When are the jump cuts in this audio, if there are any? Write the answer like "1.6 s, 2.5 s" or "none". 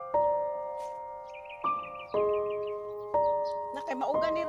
none